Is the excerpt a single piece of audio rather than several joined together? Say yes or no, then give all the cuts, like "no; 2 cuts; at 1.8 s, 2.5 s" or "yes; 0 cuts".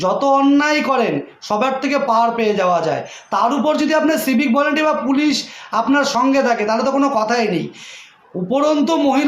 yes; 0 cuts